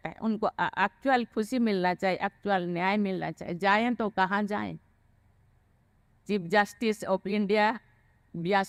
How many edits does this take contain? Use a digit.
0